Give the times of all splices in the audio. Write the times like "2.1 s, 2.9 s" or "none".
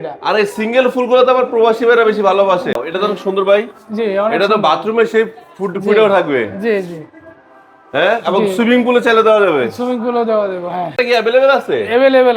2.8 s, 10.9 s